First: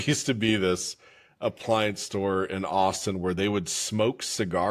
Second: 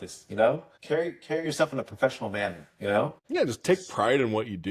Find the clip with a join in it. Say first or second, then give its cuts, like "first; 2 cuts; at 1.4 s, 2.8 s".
second; 1 cut; at 3.2 s